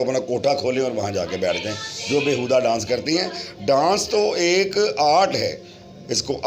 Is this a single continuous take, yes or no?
yes